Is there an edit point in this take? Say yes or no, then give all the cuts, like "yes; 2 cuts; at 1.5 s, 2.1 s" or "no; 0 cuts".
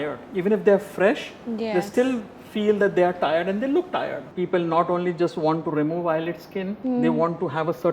yes; 2 cuts; at 4.2 s, 6.7 s